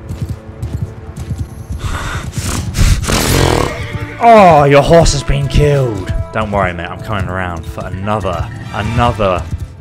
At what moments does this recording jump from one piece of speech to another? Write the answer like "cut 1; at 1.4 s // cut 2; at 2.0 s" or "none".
none